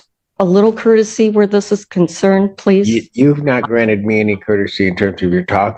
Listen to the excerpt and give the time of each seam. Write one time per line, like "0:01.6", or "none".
none

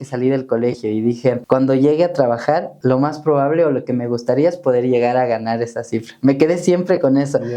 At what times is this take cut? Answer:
0:01.4
0:02.7

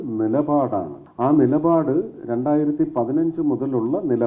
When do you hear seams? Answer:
0:01.0

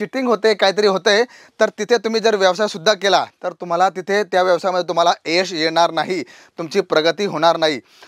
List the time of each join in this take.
none

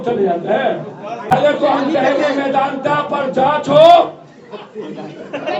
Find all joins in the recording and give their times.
0:01.3

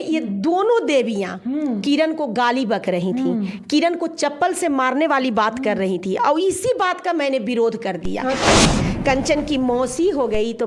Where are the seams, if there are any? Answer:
0:08.6

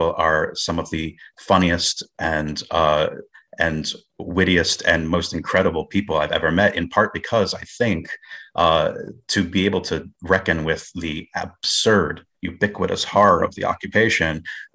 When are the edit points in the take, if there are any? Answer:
none

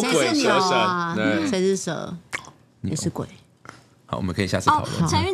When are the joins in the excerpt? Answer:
none

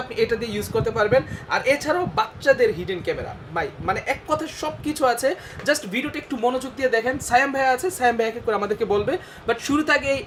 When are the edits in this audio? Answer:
none

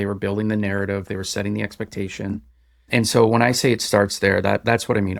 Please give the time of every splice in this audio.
none

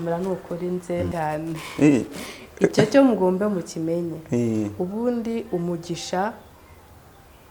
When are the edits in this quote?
0:01.1

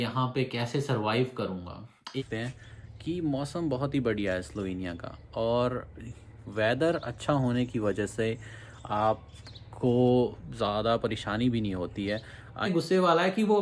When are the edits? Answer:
0:02.2
0:12.7

